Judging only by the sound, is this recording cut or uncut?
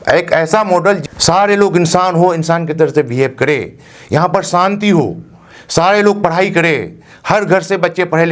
cut